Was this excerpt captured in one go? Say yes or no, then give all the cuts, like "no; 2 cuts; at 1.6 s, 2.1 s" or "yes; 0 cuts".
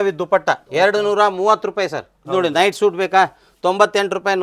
no; 1 cut; at 2.2 s